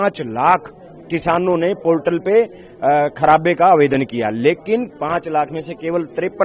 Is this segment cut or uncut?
uncut